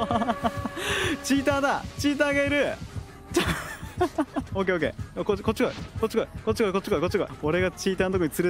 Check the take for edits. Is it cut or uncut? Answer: cut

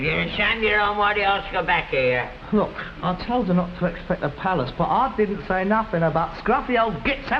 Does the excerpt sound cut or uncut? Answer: uncut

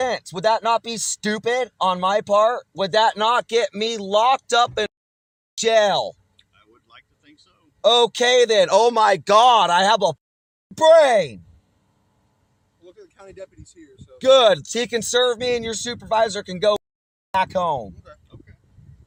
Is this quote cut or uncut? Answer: uncut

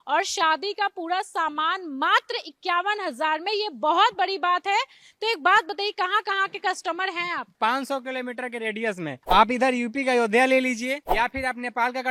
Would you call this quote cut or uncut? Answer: uncut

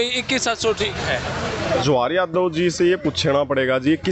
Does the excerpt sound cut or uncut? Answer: cut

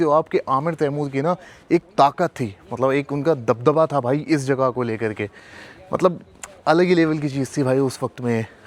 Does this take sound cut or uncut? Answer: uncut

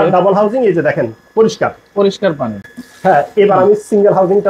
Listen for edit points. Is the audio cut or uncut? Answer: uncut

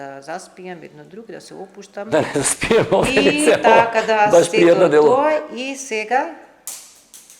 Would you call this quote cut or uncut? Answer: uncut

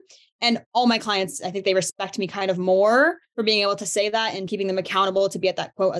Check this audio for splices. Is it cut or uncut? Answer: cut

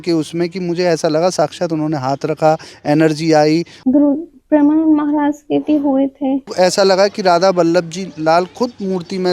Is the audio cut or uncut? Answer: cut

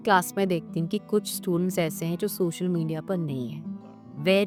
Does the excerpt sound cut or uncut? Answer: uncut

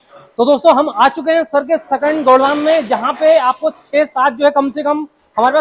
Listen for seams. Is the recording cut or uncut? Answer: uncut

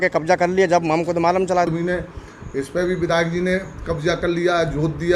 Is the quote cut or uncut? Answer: cut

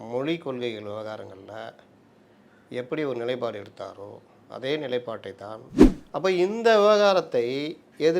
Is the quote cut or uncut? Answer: cut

